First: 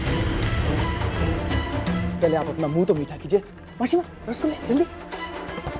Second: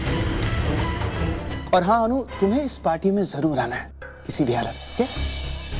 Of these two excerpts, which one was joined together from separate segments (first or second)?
second